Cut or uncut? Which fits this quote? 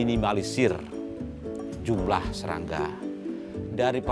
uncut